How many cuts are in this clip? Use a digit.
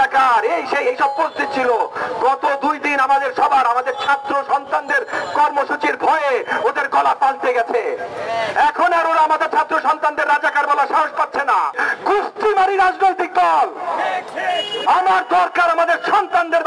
1